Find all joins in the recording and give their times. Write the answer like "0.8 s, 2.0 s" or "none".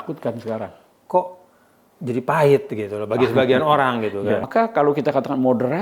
4.5 s